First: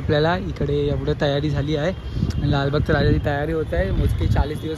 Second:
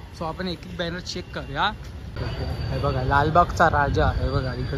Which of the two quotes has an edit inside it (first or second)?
second